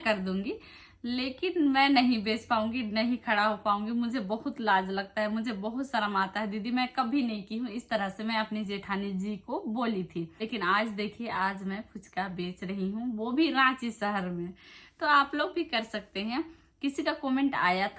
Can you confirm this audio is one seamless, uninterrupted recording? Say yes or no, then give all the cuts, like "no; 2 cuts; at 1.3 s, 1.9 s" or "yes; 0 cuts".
yes; 0 cuts